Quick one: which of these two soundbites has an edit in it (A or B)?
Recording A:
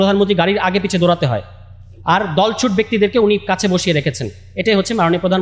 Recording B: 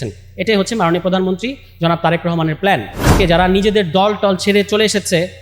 B